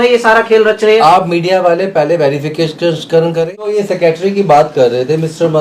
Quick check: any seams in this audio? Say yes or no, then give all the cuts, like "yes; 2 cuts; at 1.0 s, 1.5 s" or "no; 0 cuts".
yes; 1 cut; at 3.7 s